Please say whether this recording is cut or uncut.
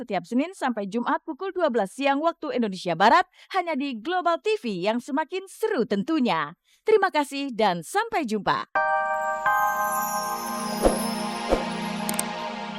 cut